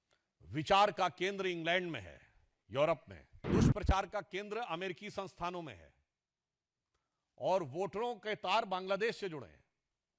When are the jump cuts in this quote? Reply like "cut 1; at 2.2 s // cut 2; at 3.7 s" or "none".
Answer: cut 1; at 3.5 s